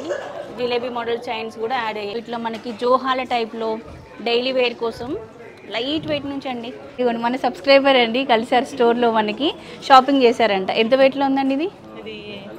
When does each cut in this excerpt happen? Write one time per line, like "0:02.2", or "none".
0:02.1
0:07.0